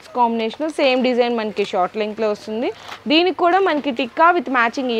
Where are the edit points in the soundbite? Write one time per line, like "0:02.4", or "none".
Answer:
none